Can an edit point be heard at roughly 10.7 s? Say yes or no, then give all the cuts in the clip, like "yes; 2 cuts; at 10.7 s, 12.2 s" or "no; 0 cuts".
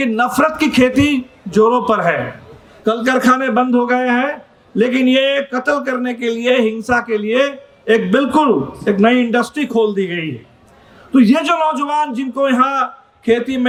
no; 0 cuts